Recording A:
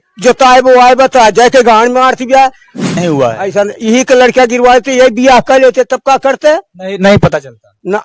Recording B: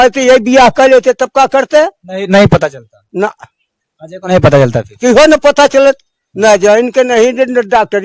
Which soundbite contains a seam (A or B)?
A